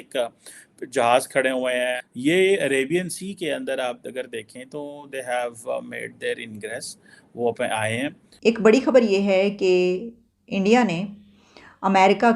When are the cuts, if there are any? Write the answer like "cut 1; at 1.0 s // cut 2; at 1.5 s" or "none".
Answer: cut 1; at 2.1 s // cut 2; at 8.3 s